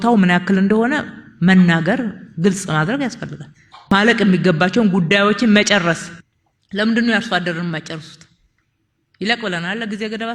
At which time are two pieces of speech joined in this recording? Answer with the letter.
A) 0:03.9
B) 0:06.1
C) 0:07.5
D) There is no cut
A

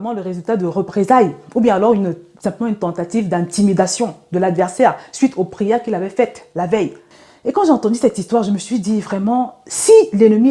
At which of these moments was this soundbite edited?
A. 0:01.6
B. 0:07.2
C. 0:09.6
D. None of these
D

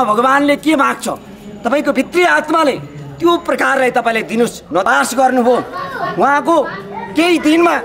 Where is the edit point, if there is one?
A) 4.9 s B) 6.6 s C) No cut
A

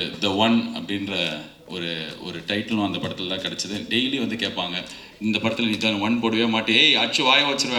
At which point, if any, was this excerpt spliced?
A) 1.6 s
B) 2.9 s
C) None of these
C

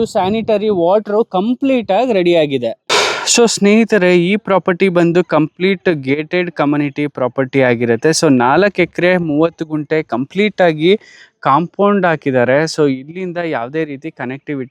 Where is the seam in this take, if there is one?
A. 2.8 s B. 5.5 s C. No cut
A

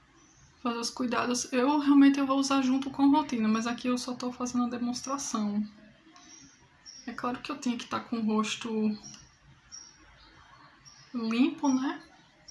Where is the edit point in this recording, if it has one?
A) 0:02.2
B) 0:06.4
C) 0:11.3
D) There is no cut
D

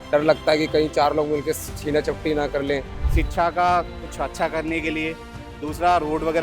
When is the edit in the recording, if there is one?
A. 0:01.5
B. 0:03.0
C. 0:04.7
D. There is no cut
B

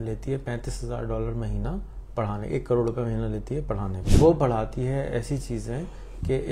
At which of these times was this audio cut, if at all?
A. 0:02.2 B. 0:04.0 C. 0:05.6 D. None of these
B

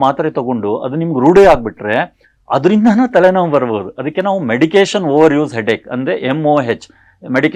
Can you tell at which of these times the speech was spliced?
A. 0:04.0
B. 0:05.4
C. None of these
C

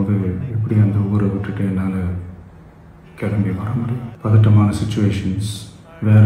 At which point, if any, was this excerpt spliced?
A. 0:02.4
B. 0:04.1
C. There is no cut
B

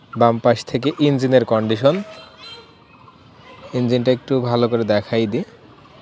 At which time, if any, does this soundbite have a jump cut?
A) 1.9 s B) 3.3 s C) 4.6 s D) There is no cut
D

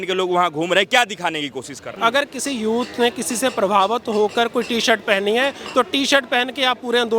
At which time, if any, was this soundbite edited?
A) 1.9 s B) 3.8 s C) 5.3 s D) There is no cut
A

